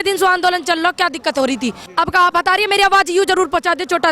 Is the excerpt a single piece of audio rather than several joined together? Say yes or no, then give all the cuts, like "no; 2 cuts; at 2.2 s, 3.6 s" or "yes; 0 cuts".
no; 1 cut; at 1.8 s